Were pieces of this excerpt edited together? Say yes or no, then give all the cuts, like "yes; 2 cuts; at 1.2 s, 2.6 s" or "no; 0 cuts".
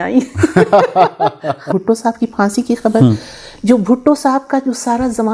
yes; 1 cut; at 1.7 s